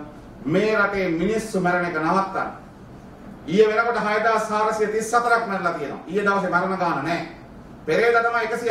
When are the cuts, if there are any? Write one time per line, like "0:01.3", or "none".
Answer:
none